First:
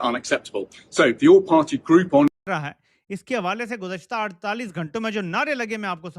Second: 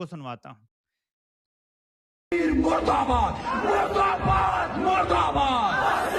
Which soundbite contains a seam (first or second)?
first